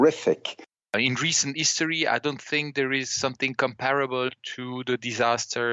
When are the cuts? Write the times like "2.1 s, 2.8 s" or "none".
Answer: 0.9 s